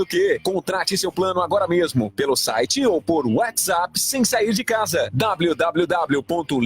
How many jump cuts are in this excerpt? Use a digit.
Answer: 1